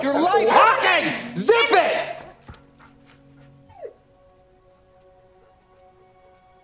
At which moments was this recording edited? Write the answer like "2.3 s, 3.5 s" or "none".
none